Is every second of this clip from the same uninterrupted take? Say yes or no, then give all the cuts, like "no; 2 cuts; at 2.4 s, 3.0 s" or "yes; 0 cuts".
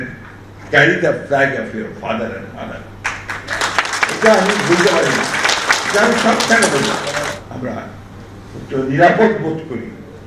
no; 1 cut; at 7.4 s